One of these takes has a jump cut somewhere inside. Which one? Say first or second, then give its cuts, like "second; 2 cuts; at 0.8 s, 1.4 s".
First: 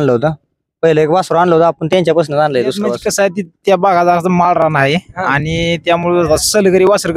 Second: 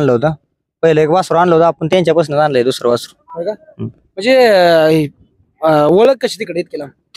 first; 1 cut; at 3.0 s